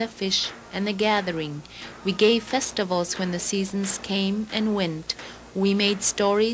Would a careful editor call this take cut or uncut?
cut